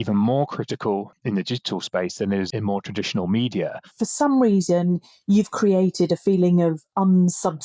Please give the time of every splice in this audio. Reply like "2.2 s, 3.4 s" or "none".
1.2 s, 2.5 s, 3.8 s